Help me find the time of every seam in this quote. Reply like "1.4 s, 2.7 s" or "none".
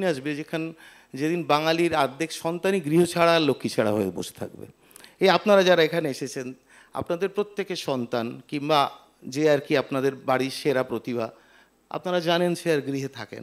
none

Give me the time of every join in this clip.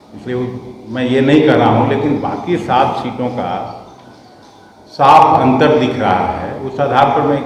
none

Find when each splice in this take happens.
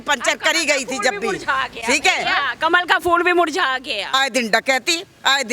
4.1 s

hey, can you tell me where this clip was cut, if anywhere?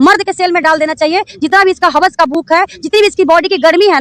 none

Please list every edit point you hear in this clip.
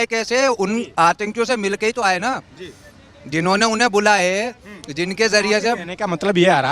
none

